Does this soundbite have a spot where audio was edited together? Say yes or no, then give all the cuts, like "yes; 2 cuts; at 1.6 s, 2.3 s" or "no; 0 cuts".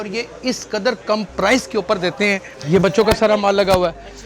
yes; 1 cut; at 2.5 s